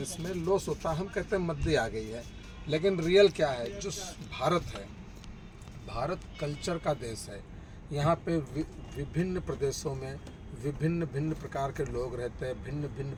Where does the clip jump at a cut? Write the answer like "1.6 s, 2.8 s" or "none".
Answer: none